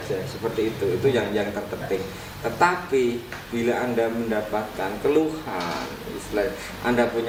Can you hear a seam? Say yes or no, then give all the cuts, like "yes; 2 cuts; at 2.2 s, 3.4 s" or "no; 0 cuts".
no; 0 cuts